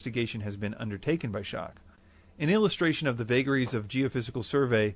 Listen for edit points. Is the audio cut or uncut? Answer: cut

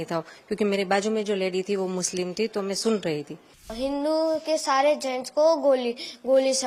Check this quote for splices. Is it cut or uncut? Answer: cut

